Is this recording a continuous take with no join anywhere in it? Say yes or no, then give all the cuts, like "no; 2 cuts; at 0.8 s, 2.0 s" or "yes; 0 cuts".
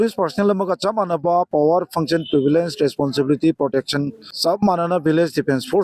yes; 0 cuts